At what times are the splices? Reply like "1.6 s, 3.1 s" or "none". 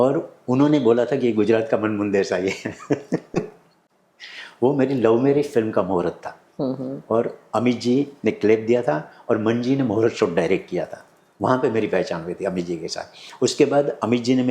none